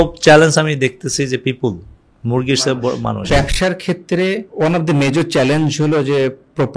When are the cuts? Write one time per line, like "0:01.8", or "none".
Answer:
0:03.3
0:04.5